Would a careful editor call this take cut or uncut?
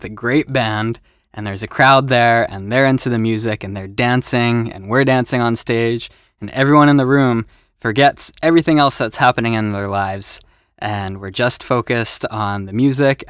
cut